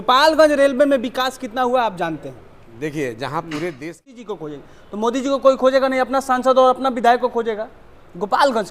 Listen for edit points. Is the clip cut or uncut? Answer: cut